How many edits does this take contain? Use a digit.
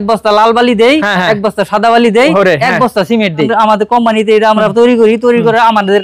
1